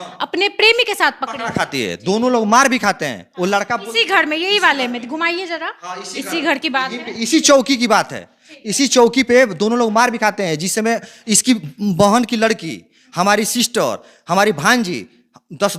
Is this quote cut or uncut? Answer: uncut